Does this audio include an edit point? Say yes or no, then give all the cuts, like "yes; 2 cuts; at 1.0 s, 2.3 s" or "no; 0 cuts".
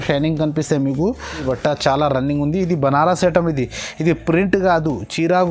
yes; 1 cut; at 1.4 s